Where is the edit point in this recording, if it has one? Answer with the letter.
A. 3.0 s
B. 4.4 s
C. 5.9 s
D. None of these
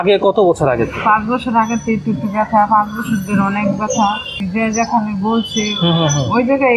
B